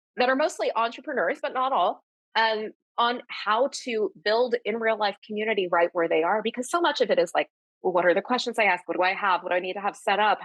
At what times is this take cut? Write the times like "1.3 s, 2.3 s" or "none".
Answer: none

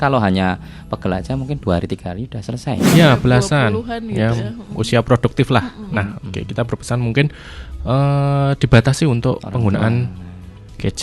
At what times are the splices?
2.9 s

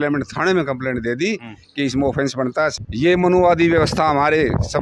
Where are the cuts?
2.8 s

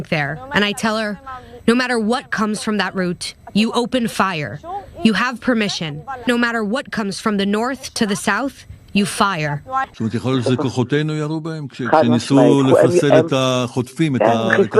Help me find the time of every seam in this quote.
6.2 s, 9.9 s

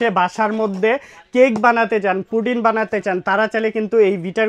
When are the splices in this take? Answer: none

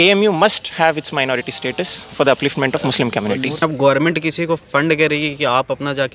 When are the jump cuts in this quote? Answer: 3.6 s

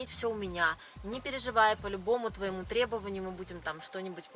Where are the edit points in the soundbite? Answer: none

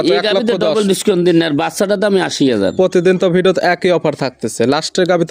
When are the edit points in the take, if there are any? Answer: none

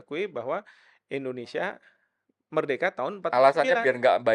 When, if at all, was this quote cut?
none

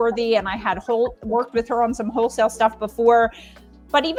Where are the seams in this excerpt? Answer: none

